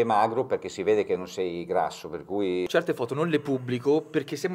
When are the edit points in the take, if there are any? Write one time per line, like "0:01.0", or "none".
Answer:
0:02.7